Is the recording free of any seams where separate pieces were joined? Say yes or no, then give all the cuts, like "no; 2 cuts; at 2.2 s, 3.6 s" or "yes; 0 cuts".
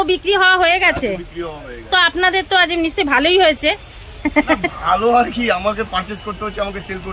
yes; 0 cuts